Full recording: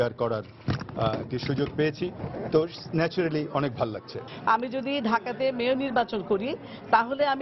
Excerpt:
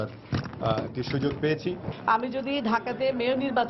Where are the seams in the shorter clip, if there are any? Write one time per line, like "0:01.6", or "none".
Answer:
0:01.9